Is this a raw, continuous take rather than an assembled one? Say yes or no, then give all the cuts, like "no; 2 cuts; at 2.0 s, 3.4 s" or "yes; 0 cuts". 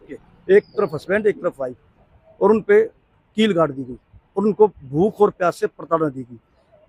yes; 0 cuts